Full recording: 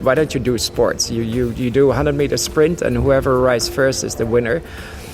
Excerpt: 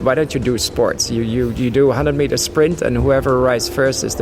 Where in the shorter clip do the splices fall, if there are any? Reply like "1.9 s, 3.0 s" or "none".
none

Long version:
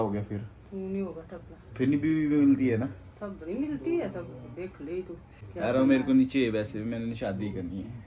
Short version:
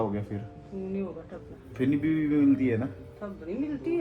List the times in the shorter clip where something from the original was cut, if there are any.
none

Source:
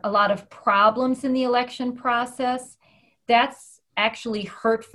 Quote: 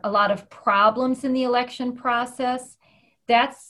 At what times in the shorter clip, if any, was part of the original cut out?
none

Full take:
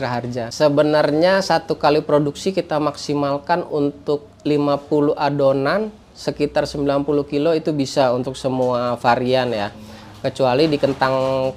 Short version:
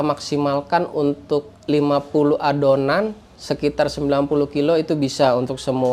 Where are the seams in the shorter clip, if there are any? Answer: none

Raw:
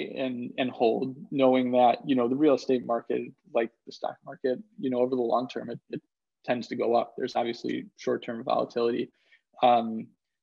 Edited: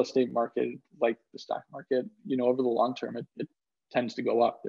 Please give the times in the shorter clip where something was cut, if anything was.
none

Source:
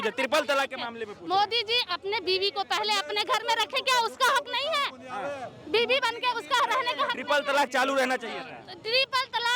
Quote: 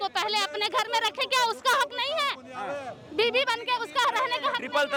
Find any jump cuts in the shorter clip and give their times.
none

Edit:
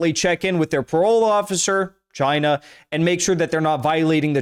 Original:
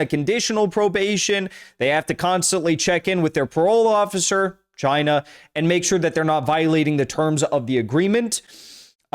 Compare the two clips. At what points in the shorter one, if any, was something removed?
none

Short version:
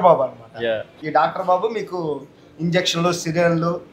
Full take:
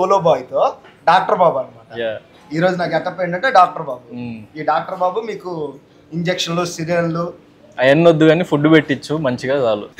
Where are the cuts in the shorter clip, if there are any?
0.9 s

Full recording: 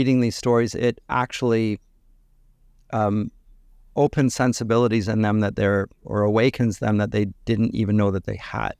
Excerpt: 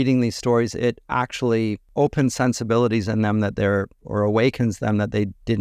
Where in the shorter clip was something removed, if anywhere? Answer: 1.8 s

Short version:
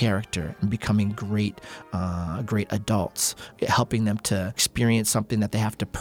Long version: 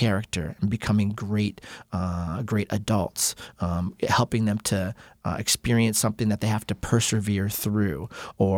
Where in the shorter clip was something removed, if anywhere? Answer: 3.5 s, 4.6 s

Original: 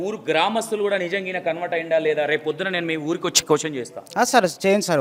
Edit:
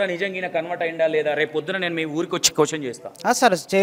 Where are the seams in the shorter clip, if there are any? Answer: none

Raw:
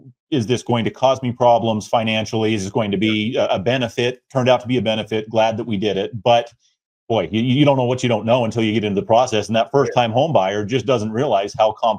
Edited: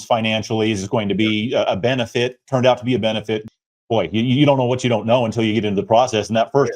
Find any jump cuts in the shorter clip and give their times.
3.4 s

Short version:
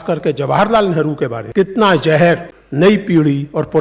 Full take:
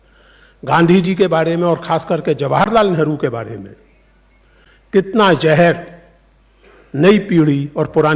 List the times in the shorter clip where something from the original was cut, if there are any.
1.4 s, 2.6 s

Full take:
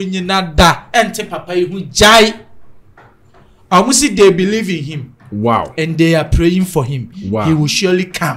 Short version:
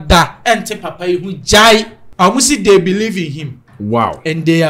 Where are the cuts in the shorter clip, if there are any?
2.0 s

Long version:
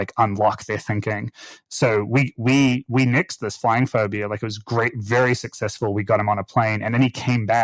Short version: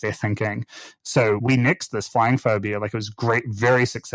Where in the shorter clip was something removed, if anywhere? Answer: 1.4 s

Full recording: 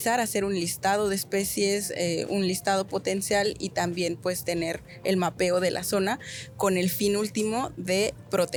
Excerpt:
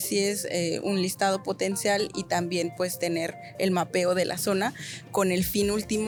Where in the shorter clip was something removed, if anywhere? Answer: none

